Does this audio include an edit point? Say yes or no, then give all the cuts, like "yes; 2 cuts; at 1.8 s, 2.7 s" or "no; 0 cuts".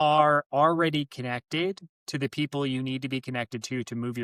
no; 0 cuts